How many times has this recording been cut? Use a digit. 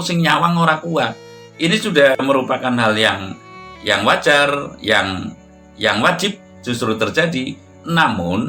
1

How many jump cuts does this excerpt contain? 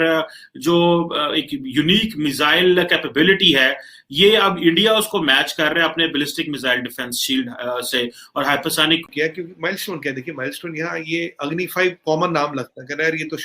1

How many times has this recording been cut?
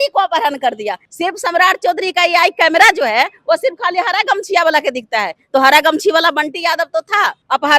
1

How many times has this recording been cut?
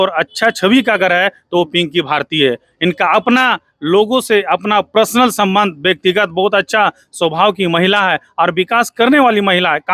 0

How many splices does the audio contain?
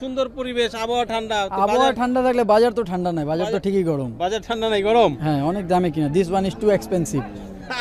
0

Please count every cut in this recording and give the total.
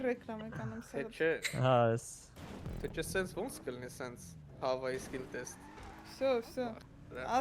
0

